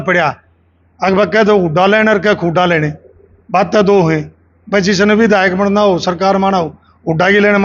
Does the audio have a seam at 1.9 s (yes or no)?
no